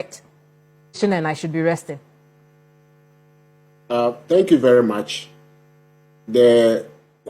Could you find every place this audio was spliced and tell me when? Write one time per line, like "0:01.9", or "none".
0:01.0